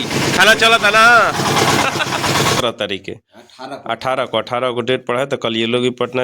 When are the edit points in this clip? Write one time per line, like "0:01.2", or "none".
0:02.6